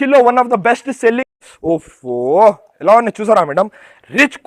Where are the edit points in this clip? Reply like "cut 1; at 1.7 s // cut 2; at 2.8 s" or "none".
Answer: cut 1; at 1.3 s